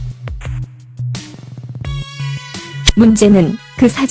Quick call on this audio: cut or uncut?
uncut